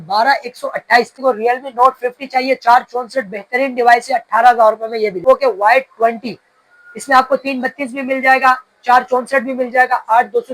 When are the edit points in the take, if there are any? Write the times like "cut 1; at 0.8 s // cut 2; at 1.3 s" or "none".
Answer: cut 1; at 1.1 s // cut 2; at 5.2 s